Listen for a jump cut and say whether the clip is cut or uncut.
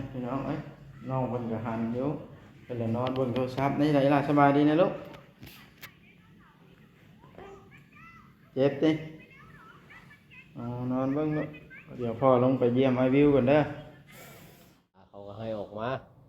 cut